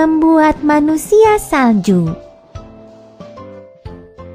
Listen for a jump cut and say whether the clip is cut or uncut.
cut